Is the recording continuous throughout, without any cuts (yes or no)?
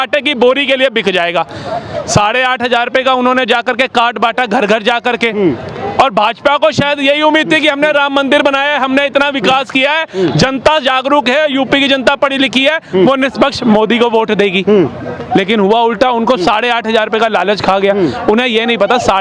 yes